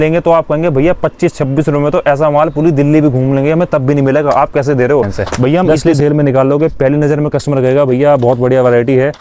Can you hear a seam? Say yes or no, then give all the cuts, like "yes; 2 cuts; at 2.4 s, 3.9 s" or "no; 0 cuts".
yes; 1 cut; at 5.8 s